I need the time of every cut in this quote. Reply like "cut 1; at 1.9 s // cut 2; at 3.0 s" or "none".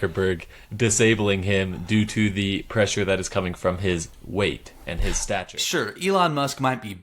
cut 1; at 5.4 s